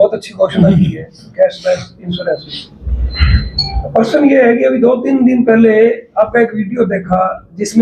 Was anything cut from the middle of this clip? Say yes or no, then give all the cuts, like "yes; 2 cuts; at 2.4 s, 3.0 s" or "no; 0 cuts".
no; 0 cuts